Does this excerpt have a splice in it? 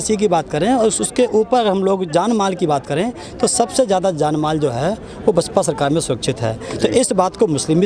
no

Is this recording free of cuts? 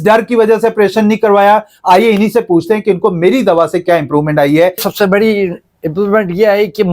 no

